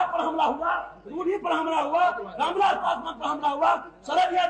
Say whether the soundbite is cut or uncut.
uncut